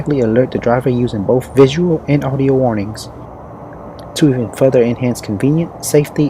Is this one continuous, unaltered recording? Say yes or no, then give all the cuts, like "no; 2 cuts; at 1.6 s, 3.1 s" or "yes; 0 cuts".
no; 1 cut; at 3.5 s